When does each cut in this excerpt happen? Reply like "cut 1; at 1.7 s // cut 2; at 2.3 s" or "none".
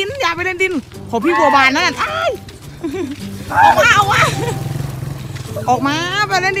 none